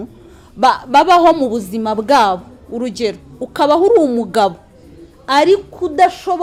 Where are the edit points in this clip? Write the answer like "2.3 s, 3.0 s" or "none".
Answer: none